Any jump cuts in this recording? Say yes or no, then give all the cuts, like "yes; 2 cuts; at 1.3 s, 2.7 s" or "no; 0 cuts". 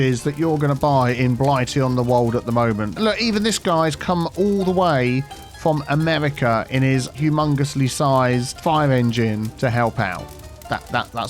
yes; 2 cuts; at 3.0 s, 7.1 s